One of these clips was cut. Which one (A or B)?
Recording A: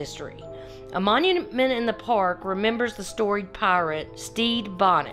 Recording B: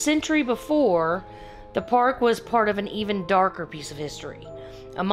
A